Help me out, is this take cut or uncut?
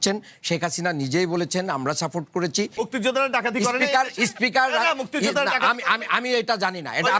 cut